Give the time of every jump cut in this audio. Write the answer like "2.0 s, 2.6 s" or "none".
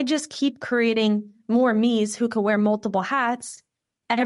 none